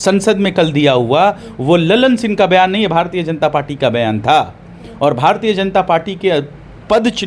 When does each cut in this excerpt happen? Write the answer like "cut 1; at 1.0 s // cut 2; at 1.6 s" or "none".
none